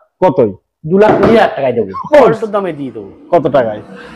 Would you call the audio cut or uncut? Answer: cut